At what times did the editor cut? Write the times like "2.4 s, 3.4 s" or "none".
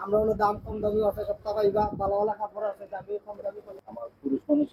3.7 s